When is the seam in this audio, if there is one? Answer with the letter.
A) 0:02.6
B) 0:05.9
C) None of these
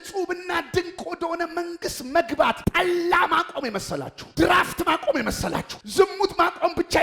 A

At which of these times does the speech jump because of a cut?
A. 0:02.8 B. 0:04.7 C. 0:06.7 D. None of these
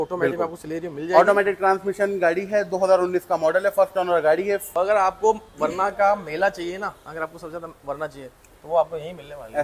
B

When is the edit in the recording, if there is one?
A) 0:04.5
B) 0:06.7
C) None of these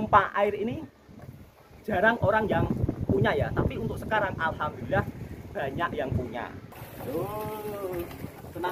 B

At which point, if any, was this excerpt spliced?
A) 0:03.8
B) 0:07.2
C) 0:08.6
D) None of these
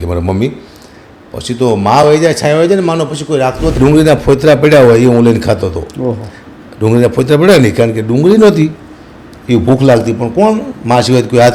A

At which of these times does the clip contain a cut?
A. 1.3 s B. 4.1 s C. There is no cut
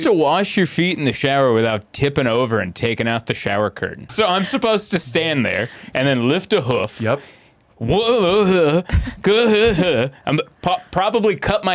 B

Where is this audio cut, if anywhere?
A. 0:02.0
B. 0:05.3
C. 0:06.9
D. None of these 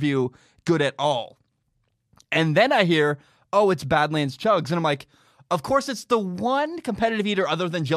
D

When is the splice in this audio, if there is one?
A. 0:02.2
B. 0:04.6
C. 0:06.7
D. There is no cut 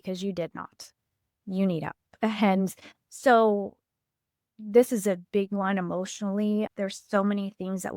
C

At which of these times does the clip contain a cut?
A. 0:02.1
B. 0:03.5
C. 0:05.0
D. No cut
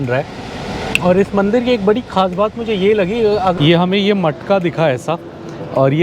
B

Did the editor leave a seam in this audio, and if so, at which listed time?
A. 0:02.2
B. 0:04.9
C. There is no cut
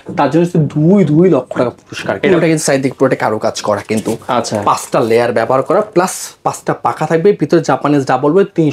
A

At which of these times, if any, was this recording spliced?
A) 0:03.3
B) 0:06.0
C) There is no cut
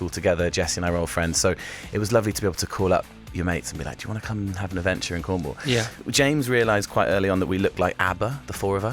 B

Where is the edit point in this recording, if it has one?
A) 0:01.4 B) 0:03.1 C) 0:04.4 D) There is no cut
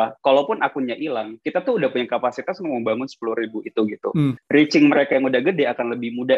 C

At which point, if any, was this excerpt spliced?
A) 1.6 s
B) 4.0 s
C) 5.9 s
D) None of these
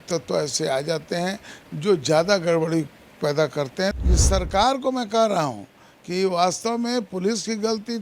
B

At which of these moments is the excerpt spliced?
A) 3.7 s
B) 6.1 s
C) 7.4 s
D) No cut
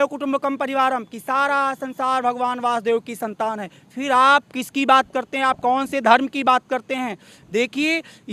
D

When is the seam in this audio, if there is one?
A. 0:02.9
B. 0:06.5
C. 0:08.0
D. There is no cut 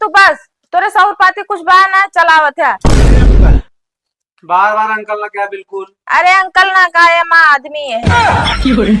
C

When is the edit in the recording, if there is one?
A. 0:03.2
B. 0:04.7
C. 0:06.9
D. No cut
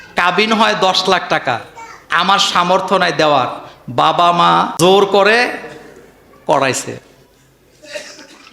B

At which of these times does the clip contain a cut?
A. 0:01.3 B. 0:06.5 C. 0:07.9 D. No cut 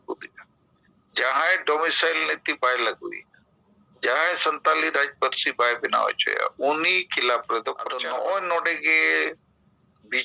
C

